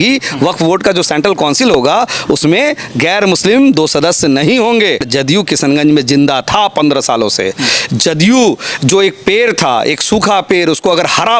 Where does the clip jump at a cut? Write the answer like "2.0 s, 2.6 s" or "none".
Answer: 5.0 s